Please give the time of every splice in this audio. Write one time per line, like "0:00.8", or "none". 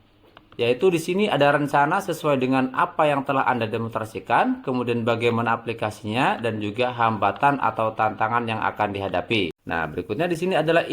0:09.5